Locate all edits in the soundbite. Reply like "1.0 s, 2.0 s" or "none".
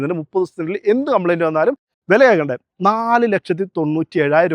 1.9 s